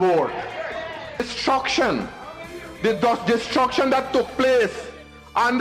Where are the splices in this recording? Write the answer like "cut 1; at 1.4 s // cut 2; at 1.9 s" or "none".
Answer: cut 1; at 1.2 s